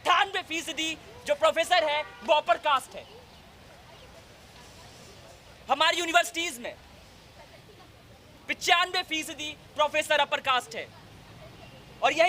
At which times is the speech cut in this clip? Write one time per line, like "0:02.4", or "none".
none